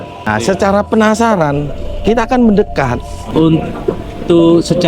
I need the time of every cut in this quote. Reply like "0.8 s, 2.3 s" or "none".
3.2 s